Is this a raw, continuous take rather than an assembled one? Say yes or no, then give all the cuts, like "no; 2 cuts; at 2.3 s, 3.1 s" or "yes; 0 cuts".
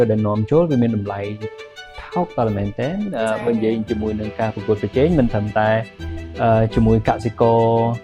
yes; 0 cuts